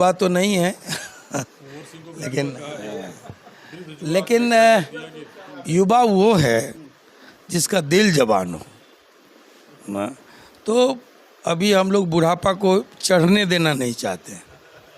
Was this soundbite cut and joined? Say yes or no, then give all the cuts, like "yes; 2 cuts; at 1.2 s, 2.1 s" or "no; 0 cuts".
no; 0 cuts